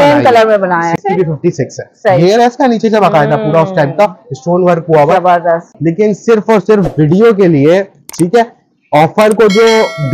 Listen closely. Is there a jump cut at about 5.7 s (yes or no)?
yes